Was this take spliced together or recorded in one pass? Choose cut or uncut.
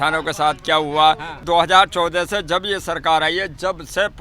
cut